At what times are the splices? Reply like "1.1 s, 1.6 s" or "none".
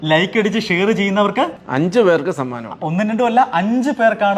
1.6 s